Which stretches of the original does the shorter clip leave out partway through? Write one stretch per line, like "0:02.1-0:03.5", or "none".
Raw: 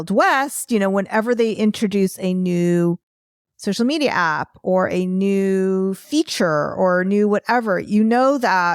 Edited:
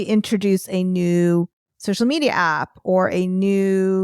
0:03.2-0:03.4